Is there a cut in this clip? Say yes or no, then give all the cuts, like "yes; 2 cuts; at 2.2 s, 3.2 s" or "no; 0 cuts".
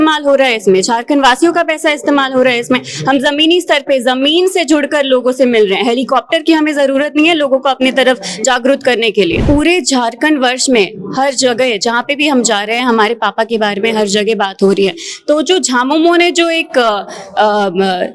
yes; 1 cut; at 9.4 s